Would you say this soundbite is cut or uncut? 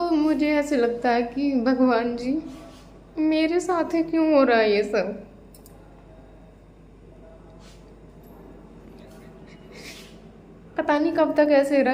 uncut